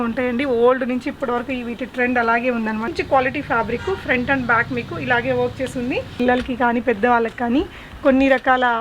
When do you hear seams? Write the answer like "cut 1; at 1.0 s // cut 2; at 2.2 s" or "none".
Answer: cut 1; at 2.9 s // cut 2; at 6.1 s